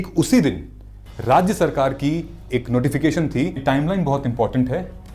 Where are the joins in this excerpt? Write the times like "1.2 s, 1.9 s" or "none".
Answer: 3.6 s

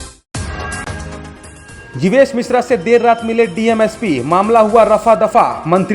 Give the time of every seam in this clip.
1.5 s

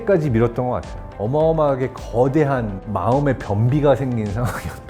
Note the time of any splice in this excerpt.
1.2 s

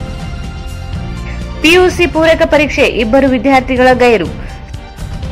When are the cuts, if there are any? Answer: none

